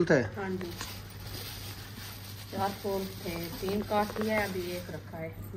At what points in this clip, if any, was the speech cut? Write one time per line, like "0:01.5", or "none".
none